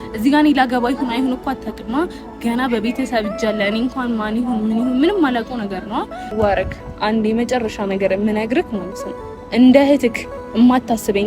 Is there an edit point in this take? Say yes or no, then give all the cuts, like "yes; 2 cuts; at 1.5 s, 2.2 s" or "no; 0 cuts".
yes; 1 cut; at 6.2 s